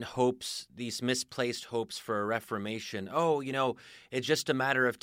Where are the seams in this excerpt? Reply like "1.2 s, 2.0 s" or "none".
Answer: none